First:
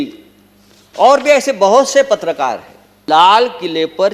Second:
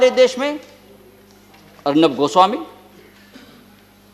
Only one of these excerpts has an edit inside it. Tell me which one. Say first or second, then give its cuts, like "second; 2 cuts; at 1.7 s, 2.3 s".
first; 1 cut; at 2.9 s